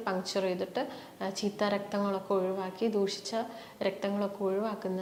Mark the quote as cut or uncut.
uncut